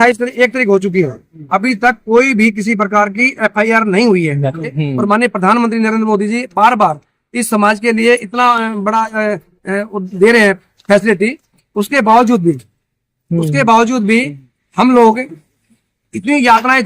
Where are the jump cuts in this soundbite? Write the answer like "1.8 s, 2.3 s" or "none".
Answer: 4.8 s, 9.5 s